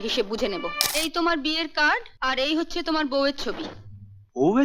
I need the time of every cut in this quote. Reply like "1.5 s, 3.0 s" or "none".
0.8 s, 2.1 s

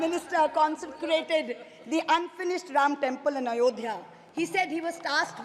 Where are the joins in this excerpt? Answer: none

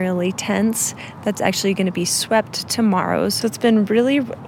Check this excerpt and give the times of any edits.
3.4 s

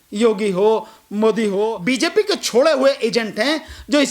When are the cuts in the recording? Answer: 1.8 s

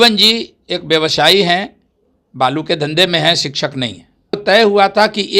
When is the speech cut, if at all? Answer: 4.4 s

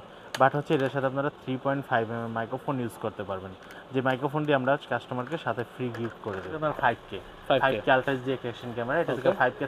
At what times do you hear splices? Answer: 6.5 s

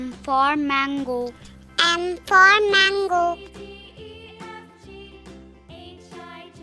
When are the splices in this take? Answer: 3.4 s

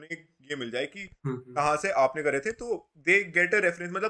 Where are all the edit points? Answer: none

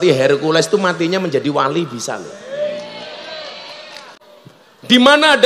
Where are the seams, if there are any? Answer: 4.2 s

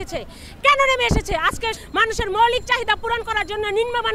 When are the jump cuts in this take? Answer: 1.8 s

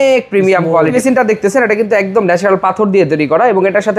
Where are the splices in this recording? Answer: 0.9 s

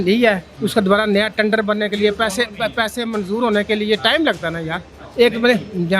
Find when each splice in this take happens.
none

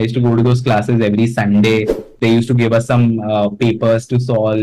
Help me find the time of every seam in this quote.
2.0 s

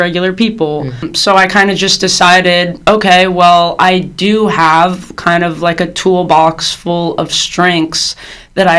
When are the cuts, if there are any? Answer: 1.1 s

